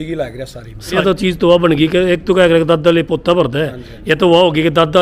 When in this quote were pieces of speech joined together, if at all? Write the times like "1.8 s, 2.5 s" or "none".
1.0 s